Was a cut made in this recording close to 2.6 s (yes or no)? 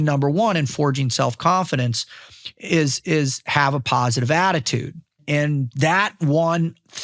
no